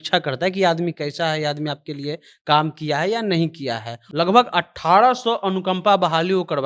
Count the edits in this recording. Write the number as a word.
one